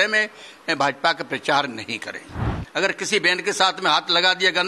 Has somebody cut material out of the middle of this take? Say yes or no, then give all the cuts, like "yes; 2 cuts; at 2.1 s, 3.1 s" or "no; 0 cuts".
yes; 1 cut; at 2.5 s